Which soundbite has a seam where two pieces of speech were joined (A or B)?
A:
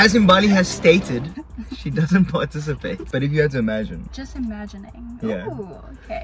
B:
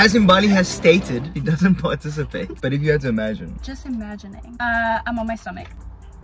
B